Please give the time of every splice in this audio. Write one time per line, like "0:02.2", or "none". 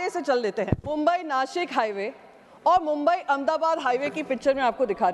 0:00.9